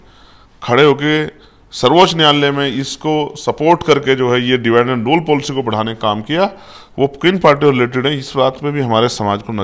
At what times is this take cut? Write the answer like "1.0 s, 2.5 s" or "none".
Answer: none